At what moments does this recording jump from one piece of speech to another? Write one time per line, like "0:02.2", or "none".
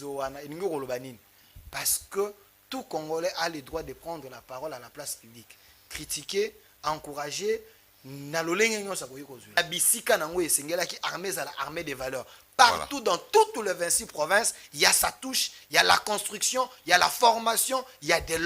0:09.6